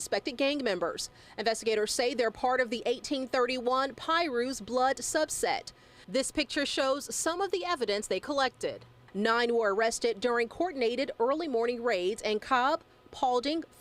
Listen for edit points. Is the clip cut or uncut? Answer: uncut